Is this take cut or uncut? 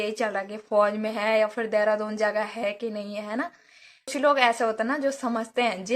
cut